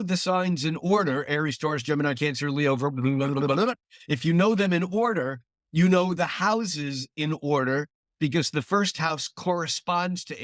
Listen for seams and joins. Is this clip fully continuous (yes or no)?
yes